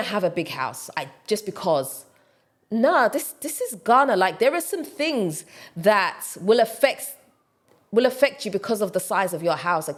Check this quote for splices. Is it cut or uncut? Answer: uncut